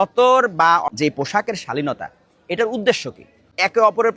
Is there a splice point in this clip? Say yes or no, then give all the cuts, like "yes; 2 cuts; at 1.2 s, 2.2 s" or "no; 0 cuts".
yes; 1 cut; at 0.9 s